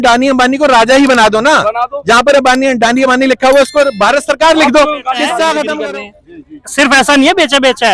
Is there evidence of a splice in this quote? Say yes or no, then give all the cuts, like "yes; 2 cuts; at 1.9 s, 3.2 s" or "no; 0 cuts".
yes; 1 cut; at 5.8 s